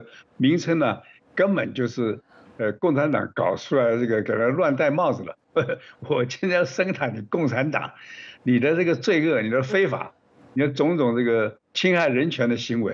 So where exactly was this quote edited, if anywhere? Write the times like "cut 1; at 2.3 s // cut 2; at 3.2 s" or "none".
cut 1; at 5.4 s // cut 2; at 11.7 s